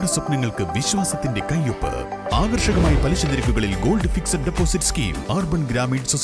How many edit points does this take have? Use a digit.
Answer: 1